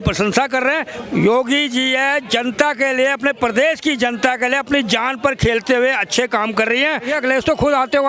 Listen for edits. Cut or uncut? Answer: cut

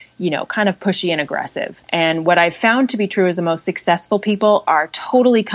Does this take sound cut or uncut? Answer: cut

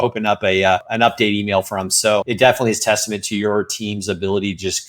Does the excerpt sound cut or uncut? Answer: cut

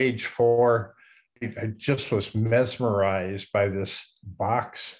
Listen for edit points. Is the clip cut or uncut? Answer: cut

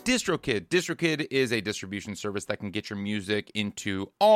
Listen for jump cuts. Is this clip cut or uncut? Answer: uncut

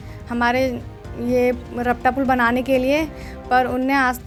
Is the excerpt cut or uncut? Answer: uncut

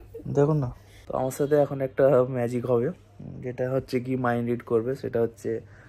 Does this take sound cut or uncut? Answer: cut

